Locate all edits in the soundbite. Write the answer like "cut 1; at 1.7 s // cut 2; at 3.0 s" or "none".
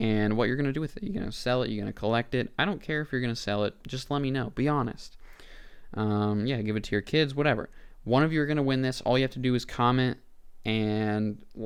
none